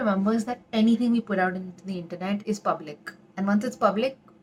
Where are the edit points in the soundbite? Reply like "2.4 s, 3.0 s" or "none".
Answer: none